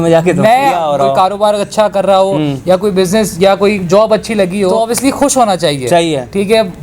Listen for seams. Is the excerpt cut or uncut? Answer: cut